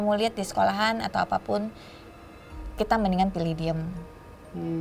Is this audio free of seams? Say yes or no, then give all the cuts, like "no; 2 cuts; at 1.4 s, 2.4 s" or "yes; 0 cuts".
yes; 0 cuts